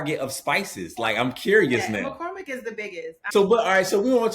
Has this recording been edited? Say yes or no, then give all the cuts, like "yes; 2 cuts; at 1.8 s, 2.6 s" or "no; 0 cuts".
yes; 1 cut; at 3.2 s